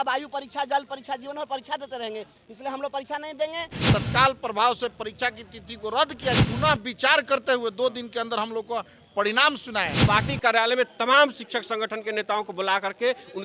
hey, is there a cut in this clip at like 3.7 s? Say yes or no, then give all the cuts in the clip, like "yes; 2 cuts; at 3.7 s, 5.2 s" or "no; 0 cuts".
yes; 3 cuts; at 3.7 s, 6.4 s, 10.0 s